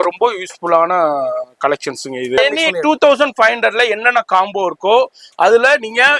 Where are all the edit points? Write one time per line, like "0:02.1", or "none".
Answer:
0:02.4